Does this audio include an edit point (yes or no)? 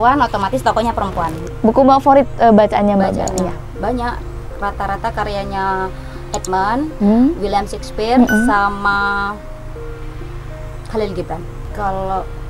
yes